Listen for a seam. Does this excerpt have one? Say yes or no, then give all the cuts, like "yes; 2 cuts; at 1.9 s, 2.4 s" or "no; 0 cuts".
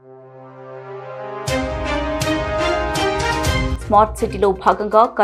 no; 0 cuts